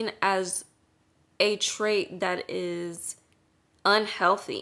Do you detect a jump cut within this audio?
no; 0 cuts

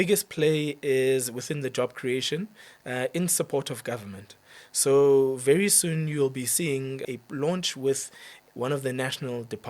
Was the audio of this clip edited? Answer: yes; 1 cut; at 7.0 s

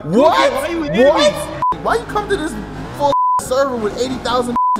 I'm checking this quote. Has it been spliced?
yes; 1 cut; at 1.7 s

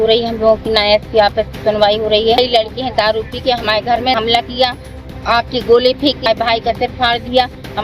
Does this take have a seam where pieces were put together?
yes; 3 cuts; at 2.4 s, 4.2 s, 6.2 s

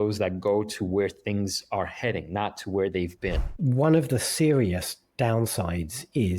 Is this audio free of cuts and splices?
no; 1 cut; at 3.5 s

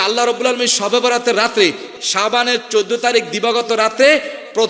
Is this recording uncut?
no; 1 cut; at 1.9 s

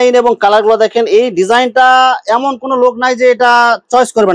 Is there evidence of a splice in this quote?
no; 0 cuts

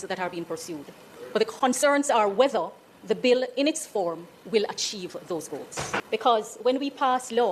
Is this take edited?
yes; 1 cut; at 5.9 s

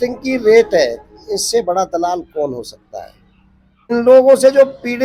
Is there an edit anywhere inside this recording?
yes; 1 cut; at 3.9 s

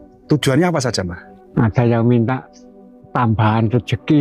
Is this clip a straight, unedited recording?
no; 1 cut; at 1.2 s

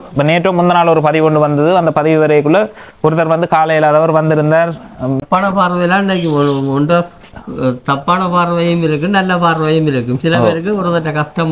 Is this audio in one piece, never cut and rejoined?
no; 1 cut; at 5.2 s

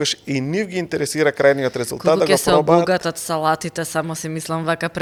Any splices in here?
no; 0 cuts

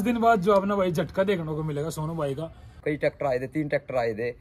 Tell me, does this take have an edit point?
yes; 1 cut; at 2.8 s

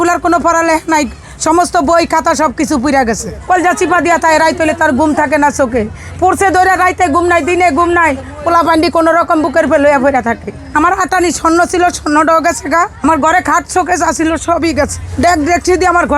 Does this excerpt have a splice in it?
yes; 4 cuts; at 3.3 s, 10.5 s, 12.9 s, 15.0 s

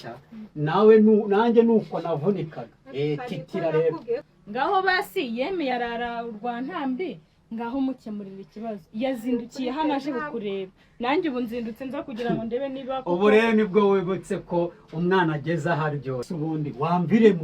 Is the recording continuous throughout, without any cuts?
no; 2 cuts; at 4.3 s, 16.3 s

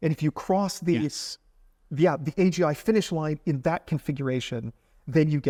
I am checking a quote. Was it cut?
no; 0 cuts

